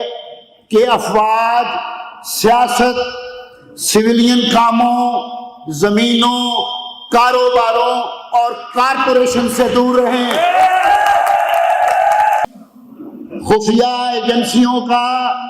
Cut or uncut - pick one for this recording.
cut